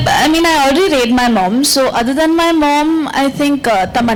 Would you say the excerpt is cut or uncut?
uncut